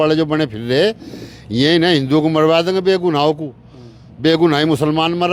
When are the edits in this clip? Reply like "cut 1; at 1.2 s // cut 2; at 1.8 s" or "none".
none